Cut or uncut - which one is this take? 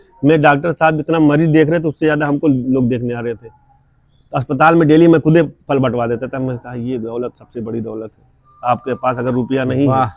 uncut